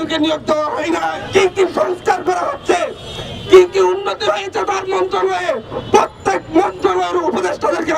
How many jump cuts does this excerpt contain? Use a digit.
1